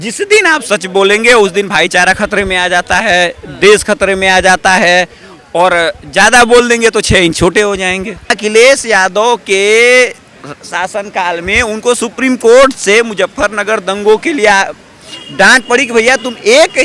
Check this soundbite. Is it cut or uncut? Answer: cut